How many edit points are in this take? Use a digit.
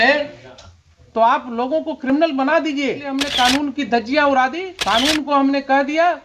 2